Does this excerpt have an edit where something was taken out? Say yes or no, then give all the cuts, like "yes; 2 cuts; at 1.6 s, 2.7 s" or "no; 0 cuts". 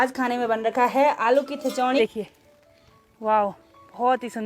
yes; 1 cut; at 2.0 s